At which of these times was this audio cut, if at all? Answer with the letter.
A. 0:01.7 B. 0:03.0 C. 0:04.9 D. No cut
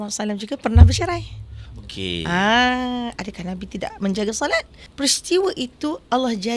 C